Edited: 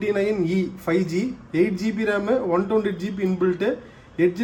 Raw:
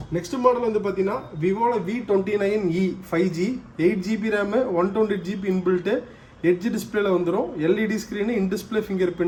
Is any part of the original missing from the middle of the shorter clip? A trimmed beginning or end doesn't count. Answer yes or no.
no